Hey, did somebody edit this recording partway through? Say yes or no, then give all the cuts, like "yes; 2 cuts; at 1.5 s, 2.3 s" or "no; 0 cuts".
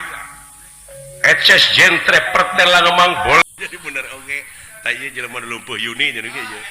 yes; 1 cut; at 3.4 s